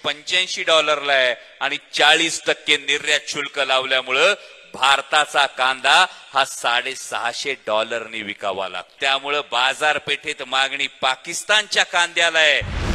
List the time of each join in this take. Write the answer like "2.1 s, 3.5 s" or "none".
8.9 s